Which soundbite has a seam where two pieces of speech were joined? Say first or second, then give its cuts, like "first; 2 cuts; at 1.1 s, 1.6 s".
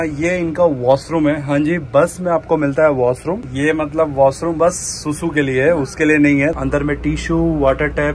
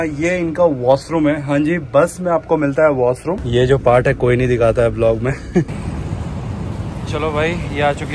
second; 2 cuts; at 3.4 s, 5.7 s